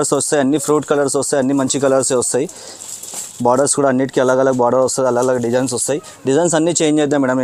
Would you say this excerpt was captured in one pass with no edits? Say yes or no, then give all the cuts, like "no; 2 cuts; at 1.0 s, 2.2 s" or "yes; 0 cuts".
yes; 0 cuts